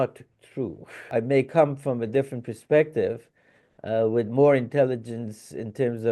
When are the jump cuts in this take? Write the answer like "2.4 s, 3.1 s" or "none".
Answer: 1.0 s